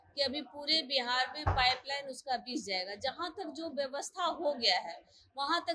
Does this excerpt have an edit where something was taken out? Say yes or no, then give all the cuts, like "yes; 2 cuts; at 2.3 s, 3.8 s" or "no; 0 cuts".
no; 0 cuts